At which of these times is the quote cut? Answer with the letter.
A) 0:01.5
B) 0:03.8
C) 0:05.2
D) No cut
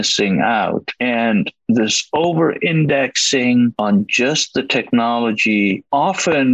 B